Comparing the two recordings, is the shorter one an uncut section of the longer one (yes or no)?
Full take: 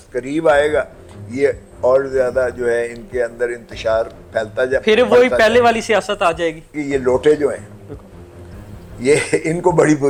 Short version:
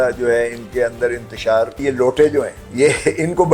no